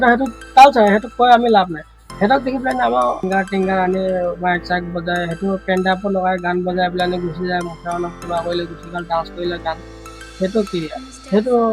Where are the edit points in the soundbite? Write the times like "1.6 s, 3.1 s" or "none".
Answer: 3.2 s